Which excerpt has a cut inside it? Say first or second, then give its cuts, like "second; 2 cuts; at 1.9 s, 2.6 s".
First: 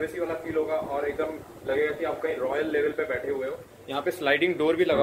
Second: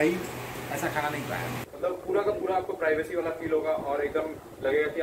second; 1 cut; at 1.7 s